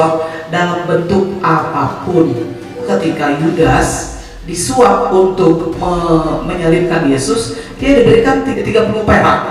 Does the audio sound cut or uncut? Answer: cut